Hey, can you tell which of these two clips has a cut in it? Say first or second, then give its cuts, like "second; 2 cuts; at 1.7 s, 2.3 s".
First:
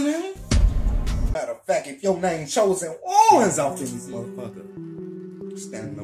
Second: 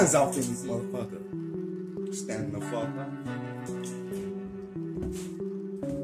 first; 1 cut; at 1.2 s